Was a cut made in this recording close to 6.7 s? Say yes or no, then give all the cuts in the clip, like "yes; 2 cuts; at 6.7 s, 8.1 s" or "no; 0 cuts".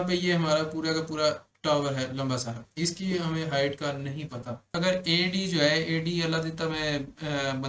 no; 1 cut; at 4.7 s